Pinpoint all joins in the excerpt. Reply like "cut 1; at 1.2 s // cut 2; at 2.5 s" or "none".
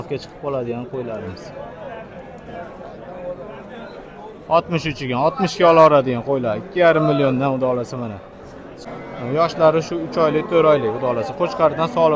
cut 1; at 8.7 s